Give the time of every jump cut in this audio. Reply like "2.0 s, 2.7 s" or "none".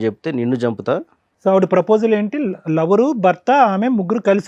none